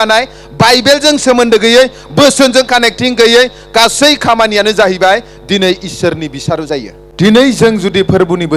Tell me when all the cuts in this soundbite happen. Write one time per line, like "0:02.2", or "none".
0:07.0

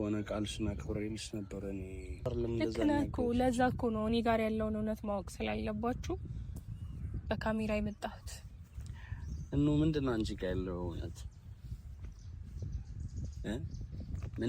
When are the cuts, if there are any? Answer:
0:02.3

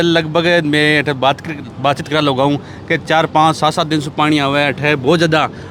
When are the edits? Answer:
none

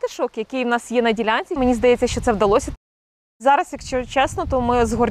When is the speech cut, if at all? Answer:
0:01.6
0:03.0

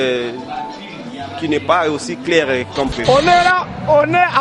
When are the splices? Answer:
0:02.9

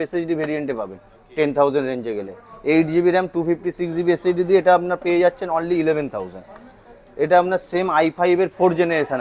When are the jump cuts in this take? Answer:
none

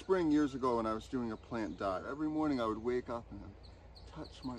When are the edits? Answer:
0:02.1

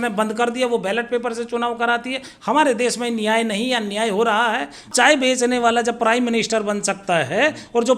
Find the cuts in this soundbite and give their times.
0:04.9

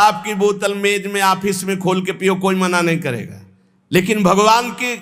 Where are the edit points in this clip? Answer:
none

